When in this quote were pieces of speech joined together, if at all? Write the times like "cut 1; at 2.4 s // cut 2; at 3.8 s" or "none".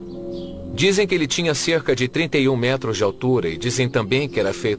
cut 1; at 2.5 s